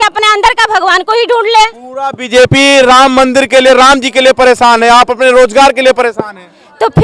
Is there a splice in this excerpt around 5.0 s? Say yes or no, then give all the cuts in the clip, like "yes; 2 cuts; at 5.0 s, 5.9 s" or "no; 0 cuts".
no; 0 cuts